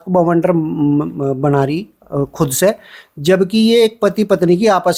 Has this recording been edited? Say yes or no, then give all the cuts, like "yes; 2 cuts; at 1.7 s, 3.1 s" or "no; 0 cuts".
no; 0 cuts